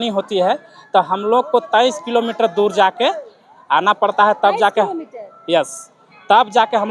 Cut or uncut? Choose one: uncut